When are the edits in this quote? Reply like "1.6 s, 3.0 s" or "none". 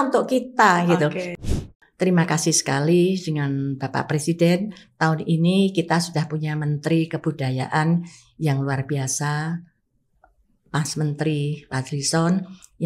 1.3 s